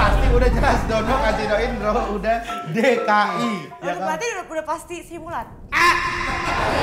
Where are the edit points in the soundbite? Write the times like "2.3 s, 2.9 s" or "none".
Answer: 3.7 s

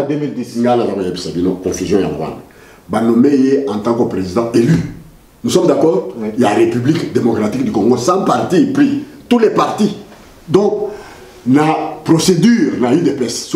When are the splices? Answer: 6.2 s

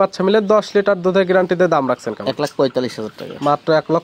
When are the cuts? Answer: none

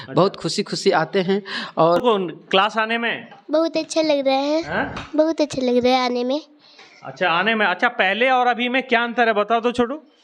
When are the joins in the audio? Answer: 2.0 s

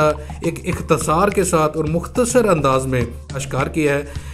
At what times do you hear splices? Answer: 3.4 s

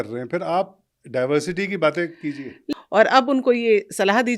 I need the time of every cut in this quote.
2.6 s

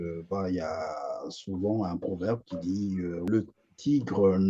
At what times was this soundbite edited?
3.3 s

